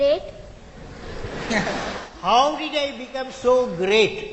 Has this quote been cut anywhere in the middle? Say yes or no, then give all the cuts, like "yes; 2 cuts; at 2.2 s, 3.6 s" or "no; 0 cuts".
no; 0 cuts